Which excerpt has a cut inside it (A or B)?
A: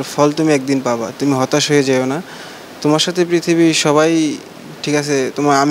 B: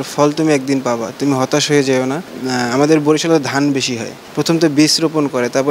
B